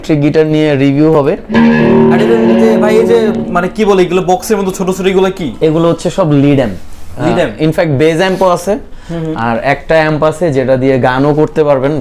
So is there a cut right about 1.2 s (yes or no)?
no